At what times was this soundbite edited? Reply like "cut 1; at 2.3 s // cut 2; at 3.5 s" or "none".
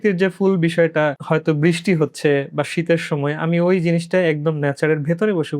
cut 1; at 1.2 s